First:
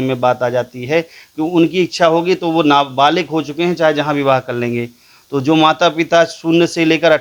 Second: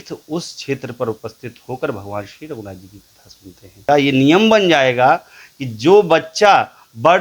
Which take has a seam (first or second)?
second